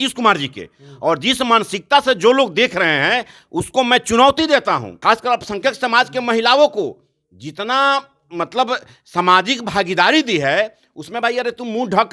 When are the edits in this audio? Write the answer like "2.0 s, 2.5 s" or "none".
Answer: 4.9 s